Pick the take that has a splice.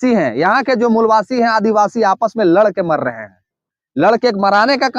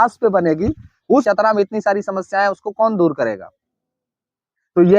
second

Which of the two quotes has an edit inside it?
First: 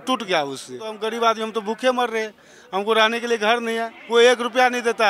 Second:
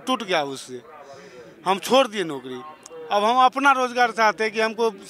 first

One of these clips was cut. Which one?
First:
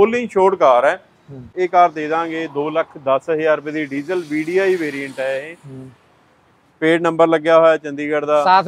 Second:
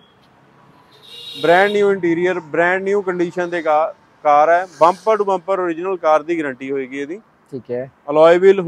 first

